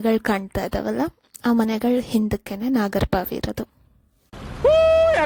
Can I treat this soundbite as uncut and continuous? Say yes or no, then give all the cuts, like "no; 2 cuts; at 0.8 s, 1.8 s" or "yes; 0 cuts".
yes; 0 cuts